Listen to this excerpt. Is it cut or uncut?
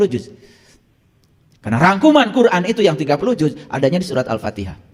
uncut